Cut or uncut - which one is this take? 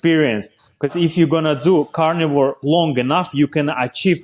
cut